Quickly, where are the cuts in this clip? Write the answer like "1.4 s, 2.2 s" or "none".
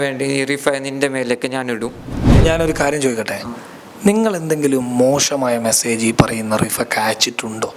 2.3 s